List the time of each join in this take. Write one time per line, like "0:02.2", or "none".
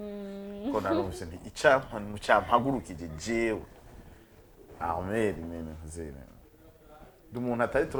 none